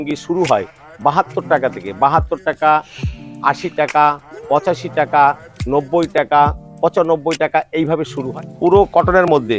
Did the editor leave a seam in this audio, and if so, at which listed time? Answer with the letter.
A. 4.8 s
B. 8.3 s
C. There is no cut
B